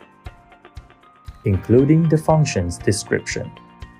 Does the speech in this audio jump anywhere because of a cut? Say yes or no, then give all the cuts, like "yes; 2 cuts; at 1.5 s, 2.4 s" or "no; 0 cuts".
yes; 1 cut; at 1.2 s